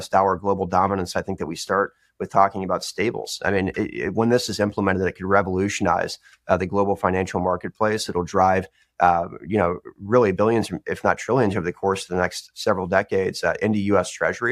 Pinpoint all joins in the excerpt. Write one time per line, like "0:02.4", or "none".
none